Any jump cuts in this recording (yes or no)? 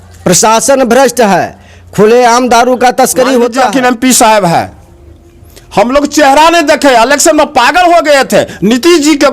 yes